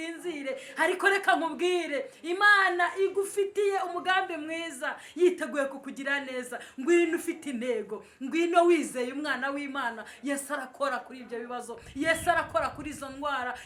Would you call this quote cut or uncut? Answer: uncut